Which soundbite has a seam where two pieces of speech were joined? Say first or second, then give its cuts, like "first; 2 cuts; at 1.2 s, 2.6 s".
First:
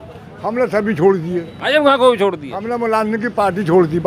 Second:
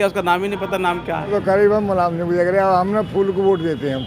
second; 1 cut; at 1.3 s